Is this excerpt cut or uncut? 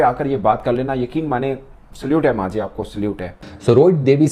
cut